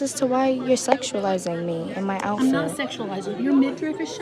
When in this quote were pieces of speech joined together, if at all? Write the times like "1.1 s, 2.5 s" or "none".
none